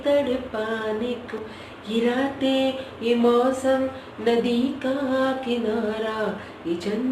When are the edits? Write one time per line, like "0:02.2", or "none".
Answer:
0:01.3